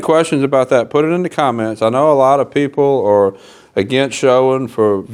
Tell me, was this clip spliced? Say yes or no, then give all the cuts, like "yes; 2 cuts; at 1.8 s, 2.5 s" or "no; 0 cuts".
no; 0 cuts